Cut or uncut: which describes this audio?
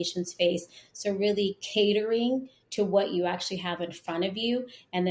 uncut